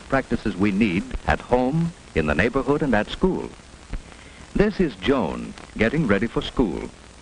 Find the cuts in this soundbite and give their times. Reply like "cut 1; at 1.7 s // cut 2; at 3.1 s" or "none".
cut 1; at 2.4 s